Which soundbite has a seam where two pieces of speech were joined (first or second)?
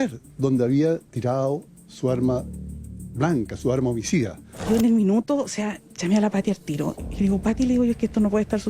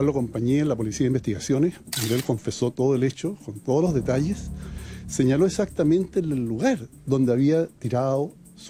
first